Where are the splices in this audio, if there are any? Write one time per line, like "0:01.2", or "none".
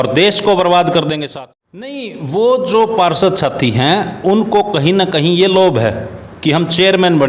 0:01.2